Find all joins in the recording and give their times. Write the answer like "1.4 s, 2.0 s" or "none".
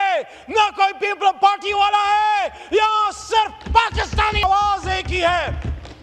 4.4 s